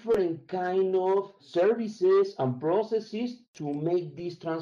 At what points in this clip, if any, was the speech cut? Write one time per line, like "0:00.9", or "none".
0:03.5